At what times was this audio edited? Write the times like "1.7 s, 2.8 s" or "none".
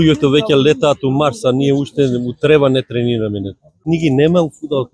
3.8 s